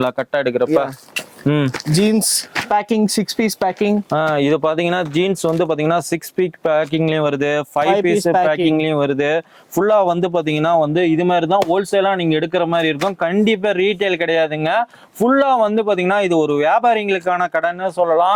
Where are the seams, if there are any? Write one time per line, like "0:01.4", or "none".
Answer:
none